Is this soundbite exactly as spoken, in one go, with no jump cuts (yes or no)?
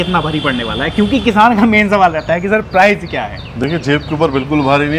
yes